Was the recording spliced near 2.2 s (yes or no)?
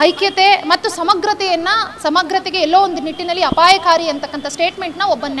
no